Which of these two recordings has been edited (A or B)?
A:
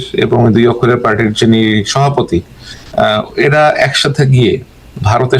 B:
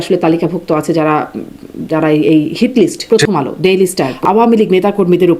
B